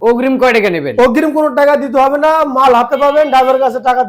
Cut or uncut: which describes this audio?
uncut